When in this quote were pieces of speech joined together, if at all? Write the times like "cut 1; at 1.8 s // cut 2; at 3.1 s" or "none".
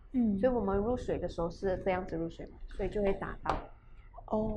none